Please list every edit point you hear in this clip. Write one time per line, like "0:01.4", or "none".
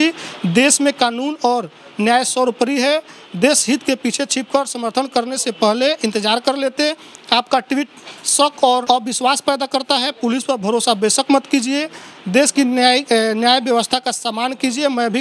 0:08.8